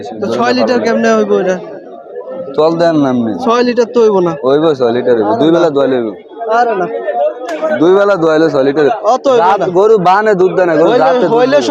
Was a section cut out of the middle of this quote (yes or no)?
no